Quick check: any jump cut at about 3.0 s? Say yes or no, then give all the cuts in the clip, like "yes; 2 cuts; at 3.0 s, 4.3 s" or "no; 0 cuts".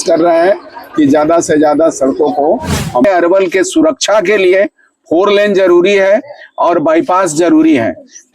yes; 1 cut; at 3.0 s